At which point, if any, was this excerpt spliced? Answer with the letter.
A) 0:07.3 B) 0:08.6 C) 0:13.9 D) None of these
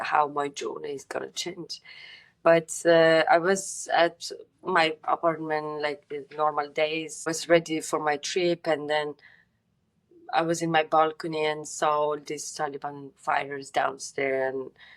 A